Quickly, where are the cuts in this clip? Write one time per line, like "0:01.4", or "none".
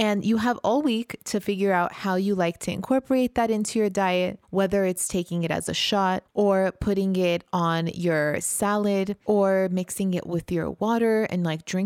0:06.3
0:09.2